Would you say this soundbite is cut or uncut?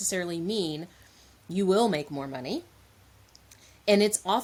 uncut